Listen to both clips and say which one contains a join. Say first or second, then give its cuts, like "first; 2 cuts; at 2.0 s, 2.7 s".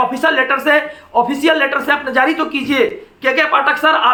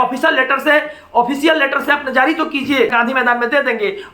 second; 1 cut; at 2.9 s